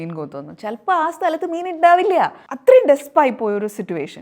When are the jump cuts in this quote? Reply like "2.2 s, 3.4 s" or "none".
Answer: 2.4 s